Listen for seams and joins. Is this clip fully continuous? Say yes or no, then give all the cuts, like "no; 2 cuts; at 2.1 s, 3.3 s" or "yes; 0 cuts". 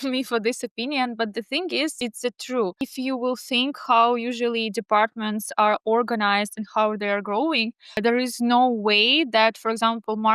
no; 2 cuts; at 2.0 s, 2.8 s